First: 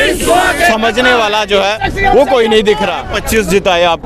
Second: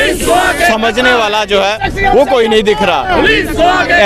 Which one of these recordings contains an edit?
first; 1 cut; at 3.0 s

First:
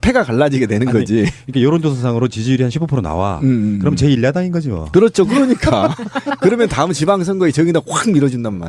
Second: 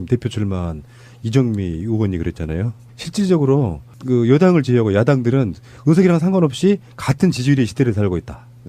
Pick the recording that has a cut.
second; 1 cut; at 2.8 s

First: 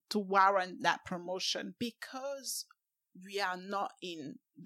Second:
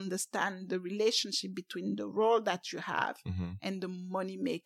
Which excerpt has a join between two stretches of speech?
first; 1 cut; at 1.7 s

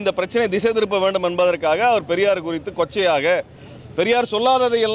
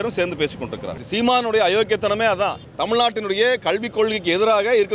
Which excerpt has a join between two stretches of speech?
second; 2 cuts; at 1.0 s, 2.6 s

